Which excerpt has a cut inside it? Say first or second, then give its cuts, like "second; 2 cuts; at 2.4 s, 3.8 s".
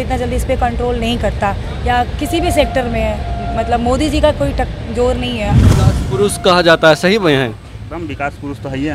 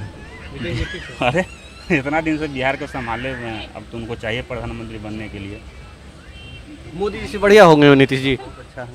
first; 1 cut; at 5.6 s